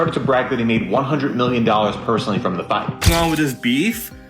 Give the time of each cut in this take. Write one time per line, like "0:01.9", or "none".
0:03.1